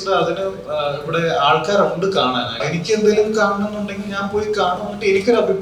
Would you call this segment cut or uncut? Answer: cut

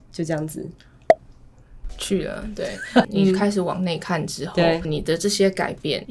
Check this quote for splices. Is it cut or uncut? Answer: uncut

